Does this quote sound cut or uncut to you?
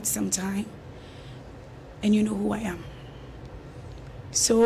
uncut